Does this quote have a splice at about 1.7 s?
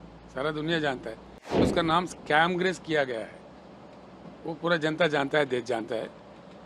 yes; 1 cut; at 1.7 s

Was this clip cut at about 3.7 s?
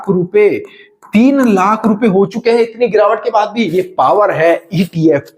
yes; 1 cut; at 3.7 s

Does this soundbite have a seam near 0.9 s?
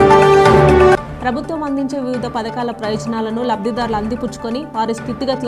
yes; 1 cut; at 0.9 s

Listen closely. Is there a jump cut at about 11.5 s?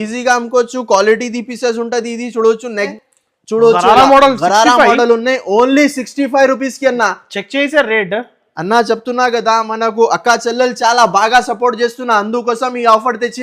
no; 1 cut; at 2.9 s

